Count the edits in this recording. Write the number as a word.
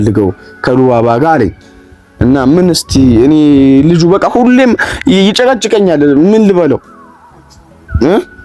zero